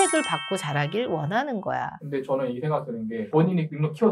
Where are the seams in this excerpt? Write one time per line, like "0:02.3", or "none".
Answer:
0:01.9
0:03.2